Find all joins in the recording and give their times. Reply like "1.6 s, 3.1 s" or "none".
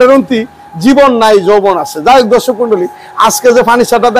none